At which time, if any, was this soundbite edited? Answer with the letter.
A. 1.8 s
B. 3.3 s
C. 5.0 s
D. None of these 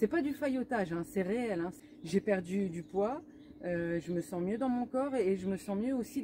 A